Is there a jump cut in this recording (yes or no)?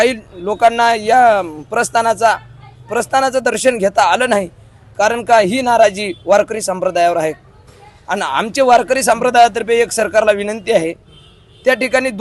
no